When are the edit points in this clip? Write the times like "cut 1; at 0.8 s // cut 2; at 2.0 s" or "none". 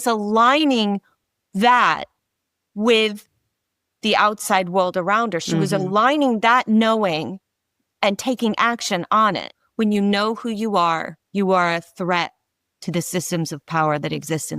cut 1; at 9.6 s

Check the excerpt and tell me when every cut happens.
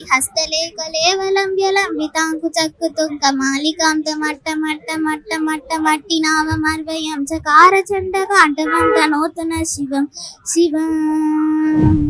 none

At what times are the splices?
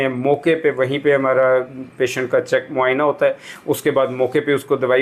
none

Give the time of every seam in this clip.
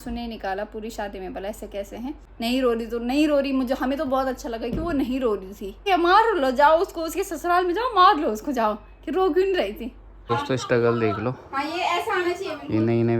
cut 1; at 2.3 s // cut 2; at 5.9 s // cut 3; at 10.3 s

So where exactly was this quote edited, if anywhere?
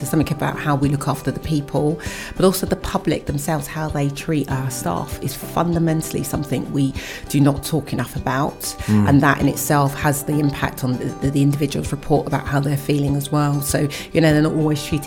none

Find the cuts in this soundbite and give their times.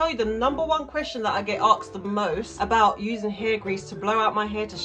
cut 1; at 2.5 s

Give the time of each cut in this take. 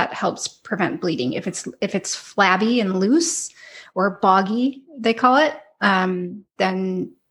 none

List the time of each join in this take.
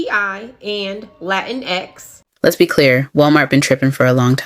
cut 1; at 2.2 s

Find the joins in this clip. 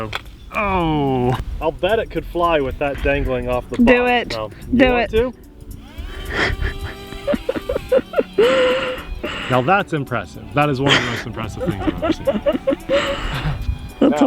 cut 1; at 1.4 s // cut 2; at 5.3 s // cut 3; at 9.3 s

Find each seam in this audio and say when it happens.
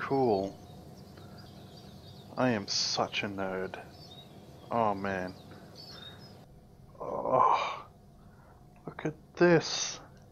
cut 1; at 1.5 s // cut 2; at 6.4 s

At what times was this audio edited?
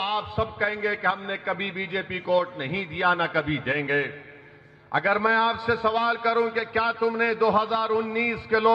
none

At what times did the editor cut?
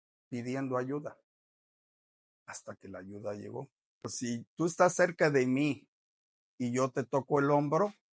cut 1; at 4.1 s

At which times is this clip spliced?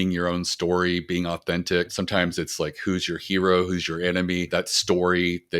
cut 1; at 1.9 s // cut 2; at 4.5 s

